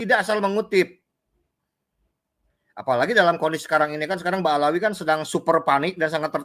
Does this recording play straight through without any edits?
yes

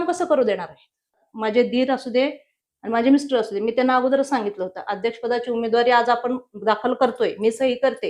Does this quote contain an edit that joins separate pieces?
yes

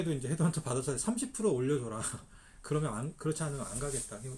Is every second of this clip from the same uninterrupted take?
yes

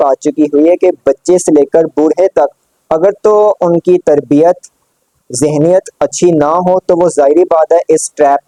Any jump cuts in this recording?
no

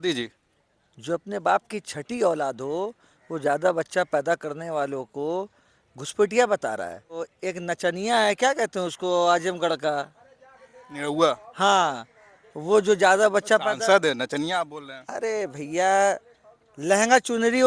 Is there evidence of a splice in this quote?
yes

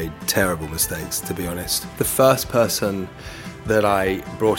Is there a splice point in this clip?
yes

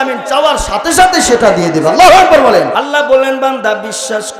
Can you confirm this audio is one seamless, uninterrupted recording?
no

